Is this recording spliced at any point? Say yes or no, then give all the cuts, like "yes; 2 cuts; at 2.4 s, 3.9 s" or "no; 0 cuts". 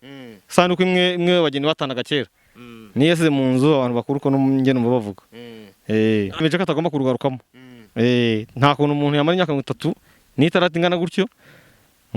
yes; 1 cut; at 6.4 s